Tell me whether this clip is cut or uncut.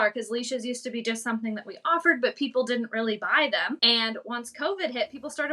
cut